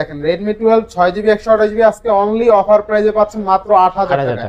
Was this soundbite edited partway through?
no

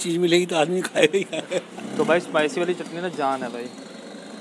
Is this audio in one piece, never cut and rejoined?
no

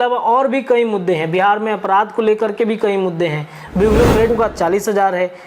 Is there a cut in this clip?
yes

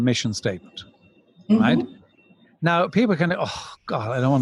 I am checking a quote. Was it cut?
no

